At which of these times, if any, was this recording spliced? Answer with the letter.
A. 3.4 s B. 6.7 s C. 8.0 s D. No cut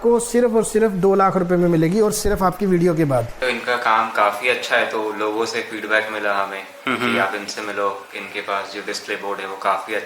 A